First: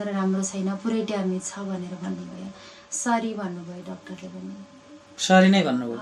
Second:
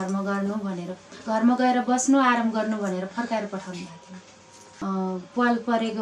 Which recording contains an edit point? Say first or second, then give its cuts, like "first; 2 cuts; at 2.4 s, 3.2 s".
second; 1 cut; at 4.8 s